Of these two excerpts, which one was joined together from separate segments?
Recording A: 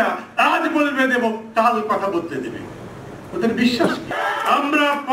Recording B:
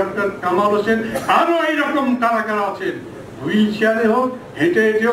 A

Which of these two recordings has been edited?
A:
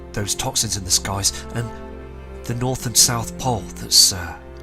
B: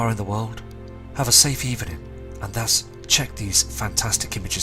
A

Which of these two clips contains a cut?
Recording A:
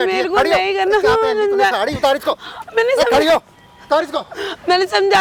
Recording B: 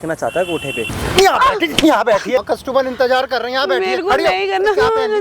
B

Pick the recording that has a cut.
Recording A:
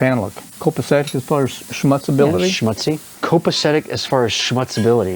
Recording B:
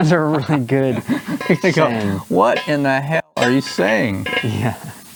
A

